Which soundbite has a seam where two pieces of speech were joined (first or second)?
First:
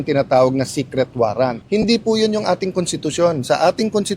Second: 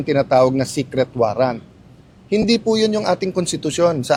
first